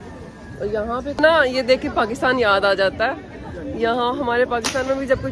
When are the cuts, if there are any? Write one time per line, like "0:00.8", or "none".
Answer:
0:01.2